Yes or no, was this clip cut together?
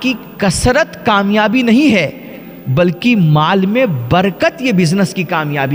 no